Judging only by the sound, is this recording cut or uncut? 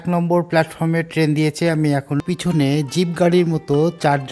cut